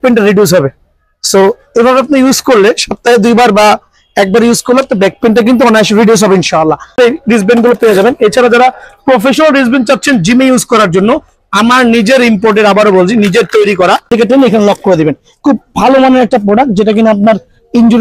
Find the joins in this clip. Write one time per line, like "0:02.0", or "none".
0:06.9
0:14.1